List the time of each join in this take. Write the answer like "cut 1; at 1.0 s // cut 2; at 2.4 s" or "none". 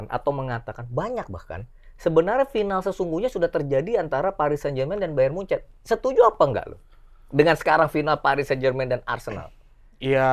none